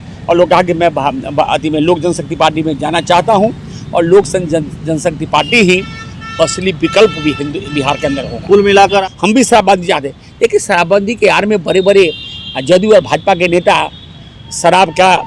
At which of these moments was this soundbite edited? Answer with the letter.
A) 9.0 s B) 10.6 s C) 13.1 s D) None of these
A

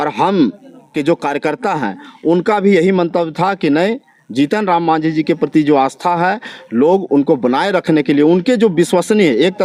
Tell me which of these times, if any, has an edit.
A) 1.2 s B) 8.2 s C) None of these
C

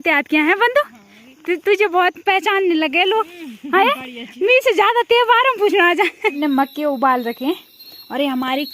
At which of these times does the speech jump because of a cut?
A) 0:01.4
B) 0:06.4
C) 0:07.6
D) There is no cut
B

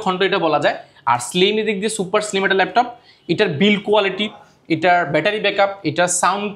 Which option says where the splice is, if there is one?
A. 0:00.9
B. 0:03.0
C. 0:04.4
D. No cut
D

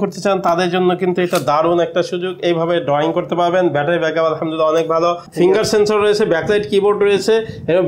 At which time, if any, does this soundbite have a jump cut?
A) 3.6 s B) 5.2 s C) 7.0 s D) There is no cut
B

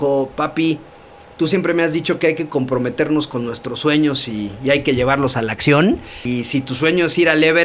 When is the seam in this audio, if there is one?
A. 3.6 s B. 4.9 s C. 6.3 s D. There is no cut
C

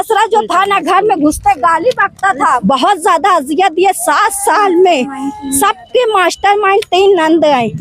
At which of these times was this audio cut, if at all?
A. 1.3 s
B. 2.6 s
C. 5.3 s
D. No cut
B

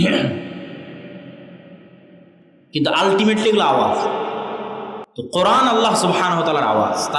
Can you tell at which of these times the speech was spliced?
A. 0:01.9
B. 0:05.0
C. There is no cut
B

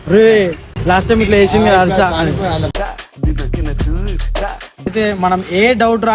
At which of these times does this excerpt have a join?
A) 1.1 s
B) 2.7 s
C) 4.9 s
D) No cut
C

